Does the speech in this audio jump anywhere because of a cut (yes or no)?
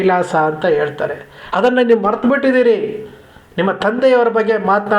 no